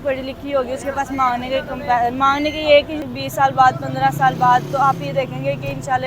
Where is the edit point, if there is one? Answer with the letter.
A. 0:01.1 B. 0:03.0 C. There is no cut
B